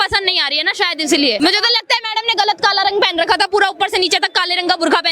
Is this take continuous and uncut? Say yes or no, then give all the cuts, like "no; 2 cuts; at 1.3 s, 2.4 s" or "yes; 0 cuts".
no; 1 cut; at 1.4 s